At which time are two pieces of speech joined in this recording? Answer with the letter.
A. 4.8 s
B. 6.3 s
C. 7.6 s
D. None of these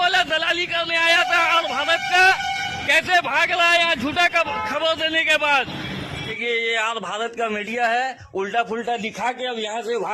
B